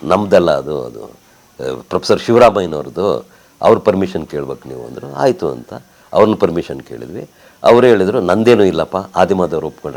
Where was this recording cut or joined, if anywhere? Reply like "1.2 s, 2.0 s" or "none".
none